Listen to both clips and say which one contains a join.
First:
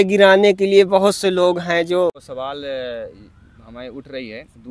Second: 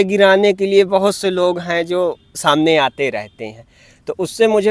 first; 1 cut; at 2.3 s

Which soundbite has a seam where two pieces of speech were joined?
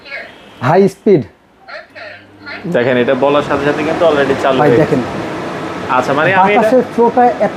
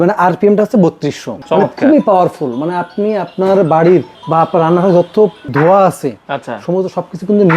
second; 2 cuts; at 1.3 s, 5.4 s

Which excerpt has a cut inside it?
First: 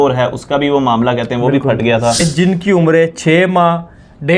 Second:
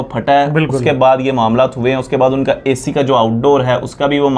first; 1 cut; at 2.2 s

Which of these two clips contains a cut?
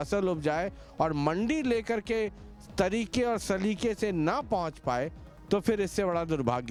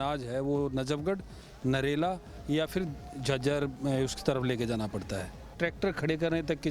second; 1 cut; at 5.5 s

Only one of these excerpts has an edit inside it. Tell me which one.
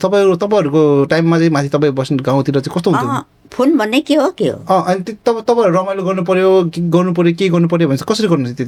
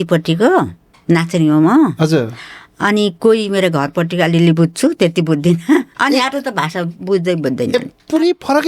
second; 1 cut; at 5.9 s

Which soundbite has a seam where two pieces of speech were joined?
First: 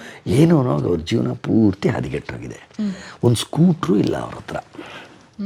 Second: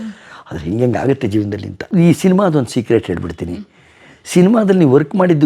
second; 1 cut; at 1.7 s

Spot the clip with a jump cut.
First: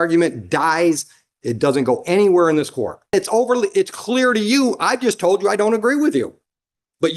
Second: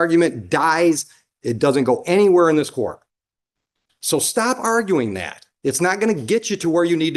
first; 1 cut; at 3.1 s

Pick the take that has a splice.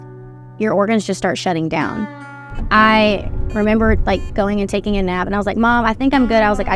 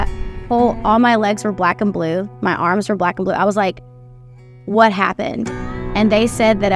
second; 1 cut; at 5.5 s

